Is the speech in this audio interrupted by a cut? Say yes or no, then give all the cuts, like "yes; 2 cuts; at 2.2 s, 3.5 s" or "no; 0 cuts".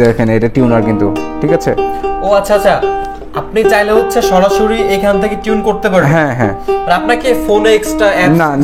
no; 0 cuts